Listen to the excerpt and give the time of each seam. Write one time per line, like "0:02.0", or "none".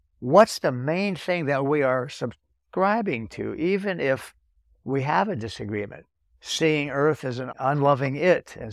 0:07.5